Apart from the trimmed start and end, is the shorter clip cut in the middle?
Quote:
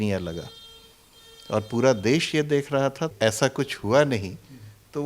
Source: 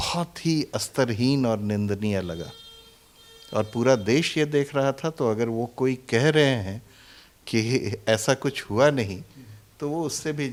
yes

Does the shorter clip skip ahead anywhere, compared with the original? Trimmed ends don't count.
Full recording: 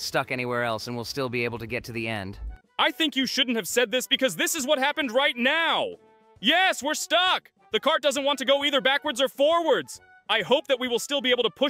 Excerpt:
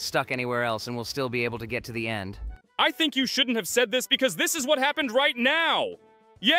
no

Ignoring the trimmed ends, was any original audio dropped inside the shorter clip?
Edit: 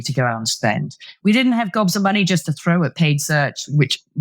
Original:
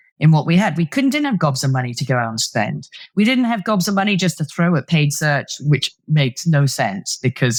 no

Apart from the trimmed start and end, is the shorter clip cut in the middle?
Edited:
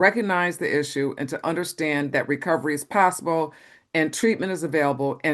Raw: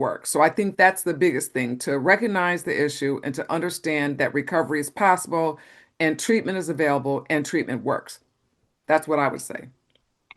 no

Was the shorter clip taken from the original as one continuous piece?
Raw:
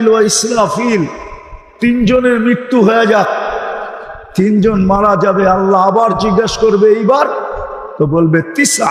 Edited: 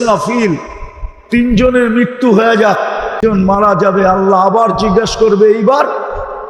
no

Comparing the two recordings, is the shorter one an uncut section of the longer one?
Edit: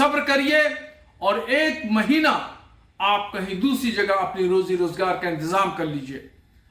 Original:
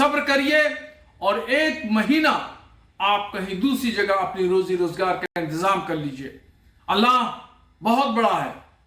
no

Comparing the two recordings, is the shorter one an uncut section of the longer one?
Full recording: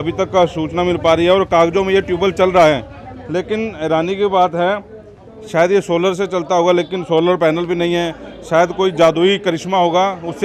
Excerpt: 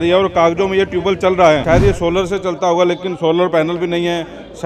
no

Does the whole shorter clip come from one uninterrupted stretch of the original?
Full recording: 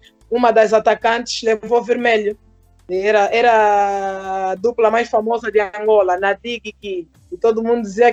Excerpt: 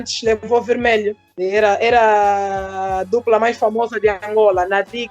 no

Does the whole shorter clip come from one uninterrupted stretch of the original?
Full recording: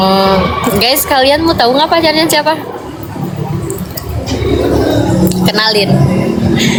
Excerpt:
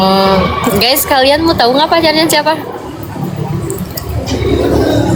yes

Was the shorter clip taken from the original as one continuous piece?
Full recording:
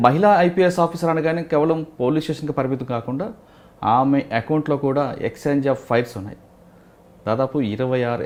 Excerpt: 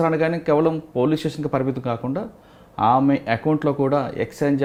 yes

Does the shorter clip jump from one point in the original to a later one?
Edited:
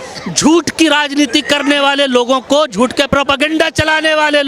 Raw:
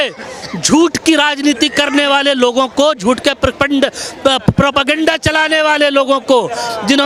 yes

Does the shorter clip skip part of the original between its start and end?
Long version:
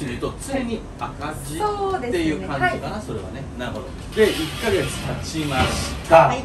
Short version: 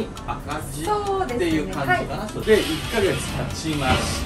yes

